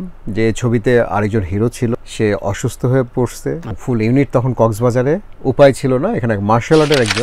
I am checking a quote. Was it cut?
yes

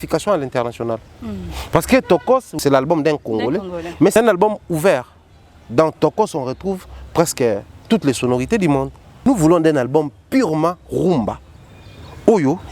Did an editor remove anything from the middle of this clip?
yes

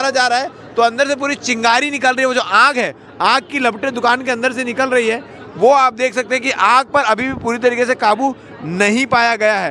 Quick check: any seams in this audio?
no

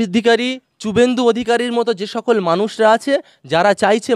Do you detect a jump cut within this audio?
no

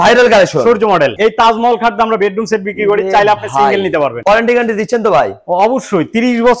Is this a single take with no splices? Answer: no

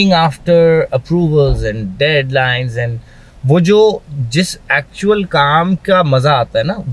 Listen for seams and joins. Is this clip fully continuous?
yes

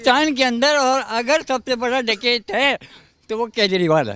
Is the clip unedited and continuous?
yes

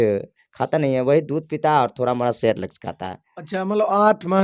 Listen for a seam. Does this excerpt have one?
no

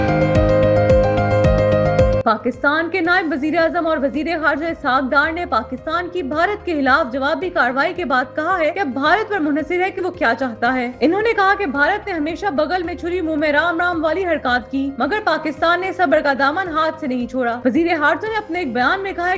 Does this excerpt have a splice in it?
yes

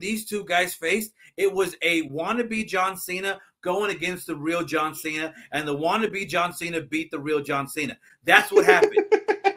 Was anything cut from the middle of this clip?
no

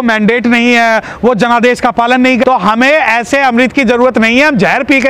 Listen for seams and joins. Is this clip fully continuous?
no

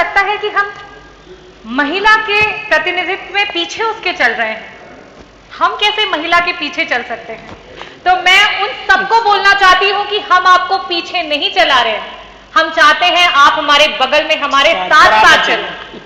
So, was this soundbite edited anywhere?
no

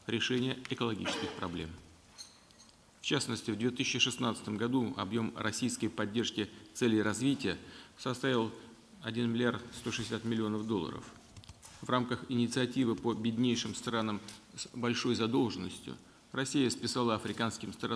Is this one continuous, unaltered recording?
yes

